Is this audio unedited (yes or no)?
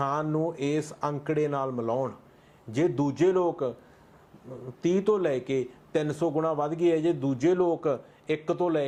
yes